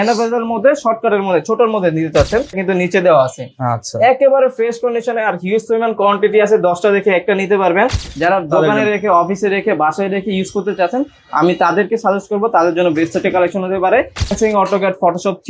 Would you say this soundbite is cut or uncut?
cut